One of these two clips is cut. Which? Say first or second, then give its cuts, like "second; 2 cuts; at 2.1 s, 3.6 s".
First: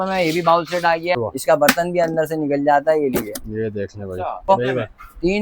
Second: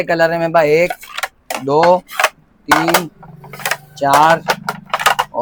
first; 2 cuts; at 1.1 s, 4.5 s